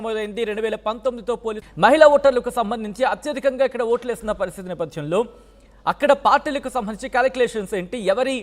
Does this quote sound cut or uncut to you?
cut